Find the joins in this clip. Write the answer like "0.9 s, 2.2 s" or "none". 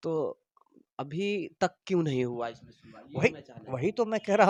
none